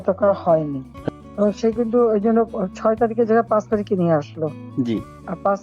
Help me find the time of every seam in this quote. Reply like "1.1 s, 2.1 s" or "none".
1.2 s